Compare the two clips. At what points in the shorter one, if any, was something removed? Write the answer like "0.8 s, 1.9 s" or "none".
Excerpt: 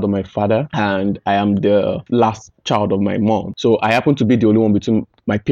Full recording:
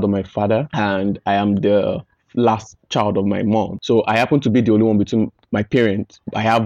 2.0 s